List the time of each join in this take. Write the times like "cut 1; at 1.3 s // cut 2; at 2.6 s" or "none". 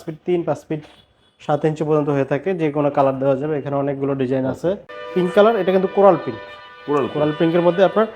cut 1; at 4.9 s